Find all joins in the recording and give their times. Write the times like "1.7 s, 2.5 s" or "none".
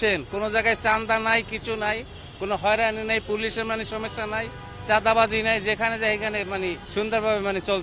6.8 s